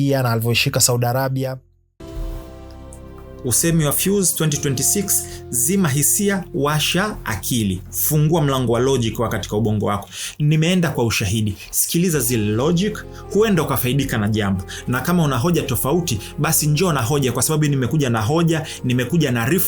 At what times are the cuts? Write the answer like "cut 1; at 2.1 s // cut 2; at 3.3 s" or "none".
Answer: none